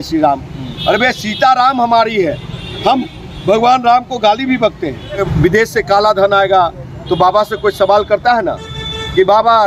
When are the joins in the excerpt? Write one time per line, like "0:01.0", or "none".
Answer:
0:05.3